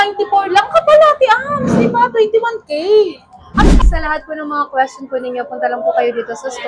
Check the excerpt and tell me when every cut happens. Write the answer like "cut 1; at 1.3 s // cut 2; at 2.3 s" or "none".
cut 1; at 3.7 s